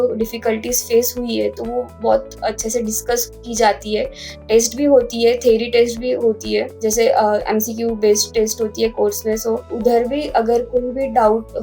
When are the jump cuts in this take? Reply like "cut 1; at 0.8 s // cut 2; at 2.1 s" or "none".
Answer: cut 1; at 1.9 s // cut 2; at 6.7 s // cut 3; at 9.7 s